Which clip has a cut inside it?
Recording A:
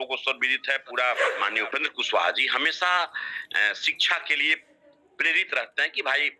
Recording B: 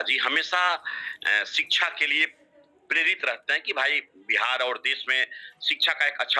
A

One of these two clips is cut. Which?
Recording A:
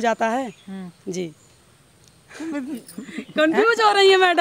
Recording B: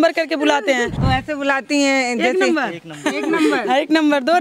B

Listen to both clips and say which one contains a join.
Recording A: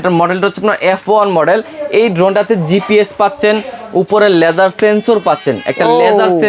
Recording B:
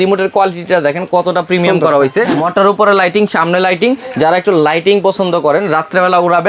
B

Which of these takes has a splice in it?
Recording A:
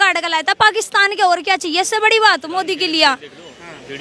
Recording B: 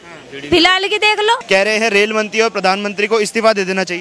B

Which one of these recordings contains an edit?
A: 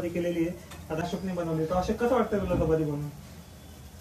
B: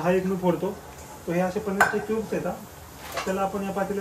A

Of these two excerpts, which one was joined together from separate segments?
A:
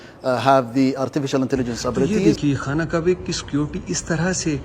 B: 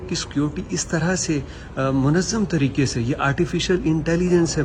A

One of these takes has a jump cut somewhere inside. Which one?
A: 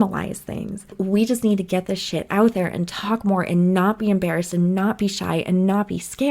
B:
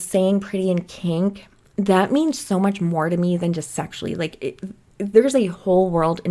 A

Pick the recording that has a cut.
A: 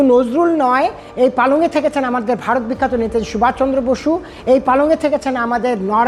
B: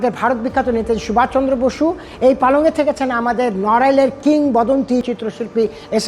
B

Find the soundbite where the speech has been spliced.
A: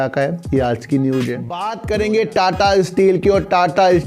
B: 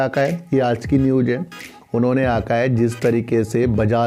A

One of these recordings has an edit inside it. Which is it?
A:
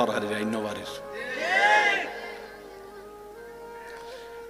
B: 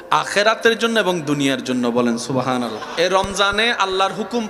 B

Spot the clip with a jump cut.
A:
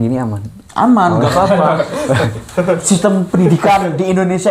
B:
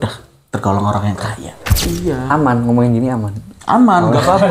B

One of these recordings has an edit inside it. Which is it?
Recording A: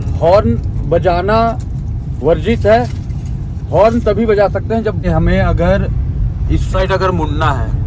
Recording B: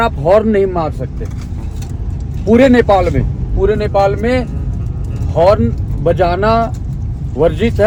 A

